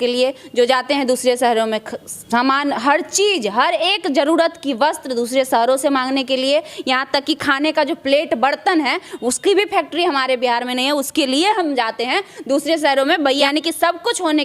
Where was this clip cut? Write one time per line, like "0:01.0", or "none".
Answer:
0:13.4

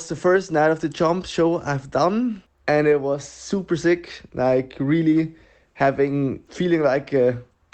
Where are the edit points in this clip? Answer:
0:02.5
0:06.4

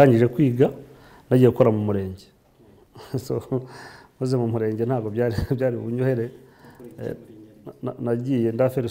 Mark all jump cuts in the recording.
none

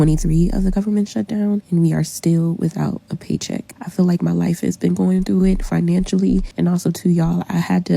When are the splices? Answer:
0:01.6
0:03.6
0:06.5

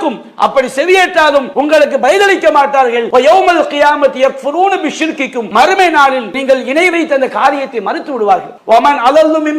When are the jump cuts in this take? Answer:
0:01.5
0:03.0
0:05.4
0:08.5

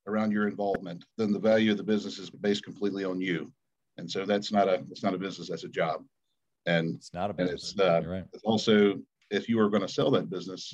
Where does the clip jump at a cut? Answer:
0:01.2
0:02.4

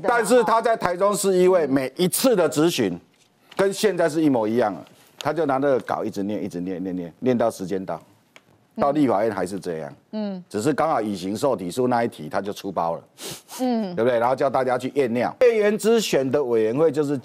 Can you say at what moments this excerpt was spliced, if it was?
0:15.4

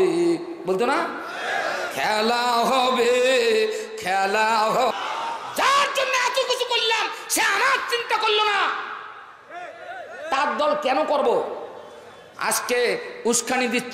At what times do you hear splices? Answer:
0:04.9

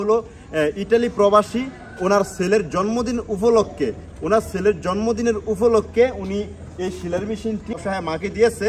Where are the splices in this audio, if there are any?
0:07.8

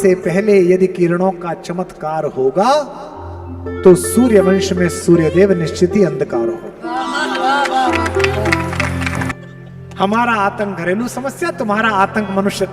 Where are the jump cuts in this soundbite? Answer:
0:09.4

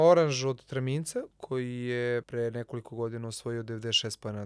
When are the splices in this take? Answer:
0:01.3
0:02.3

